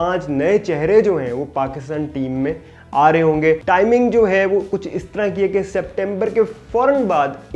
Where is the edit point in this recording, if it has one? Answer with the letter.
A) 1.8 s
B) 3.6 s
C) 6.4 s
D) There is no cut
B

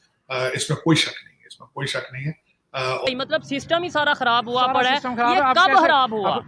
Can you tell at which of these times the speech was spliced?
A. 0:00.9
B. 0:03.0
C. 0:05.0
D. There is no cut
B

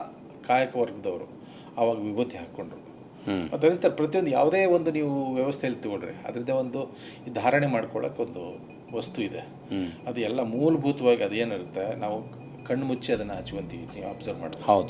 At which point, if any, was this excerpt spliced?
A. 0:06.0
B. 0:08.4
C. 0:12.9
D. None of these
D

